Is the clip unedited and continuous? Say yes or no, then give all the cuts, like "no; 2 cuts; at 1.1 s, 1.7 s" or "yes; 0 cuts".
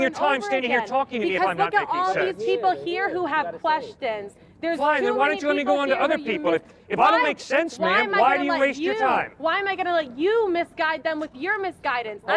yes; 0 cuts